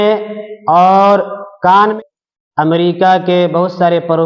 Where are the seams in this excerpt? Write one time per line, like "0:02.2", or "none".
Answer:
0:01.9